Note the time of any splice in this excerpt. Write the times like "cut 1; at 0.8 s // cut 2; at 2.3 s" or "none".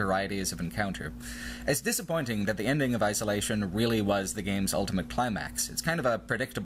cut 1; at 2.5 s

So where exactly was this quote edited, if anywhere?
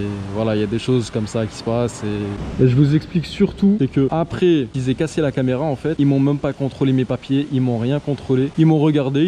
none

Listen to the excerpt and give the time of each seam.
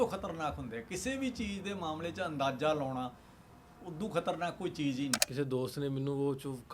cut 1; at 5.2 s

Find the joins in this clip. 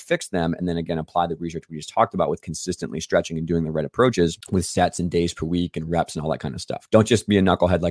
cut 1; at 4.4 s // cut 2; at 6.7 s

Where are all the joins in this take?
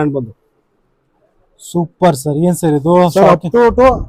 none

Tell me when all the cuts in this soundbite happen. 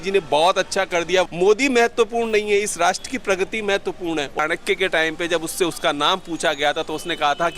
cut 1; at 1.3 s // cut 2; at 4.4 s

